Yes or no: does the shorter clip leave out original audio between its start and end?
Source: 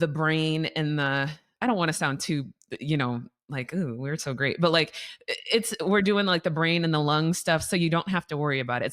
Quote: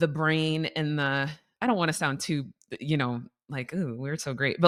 no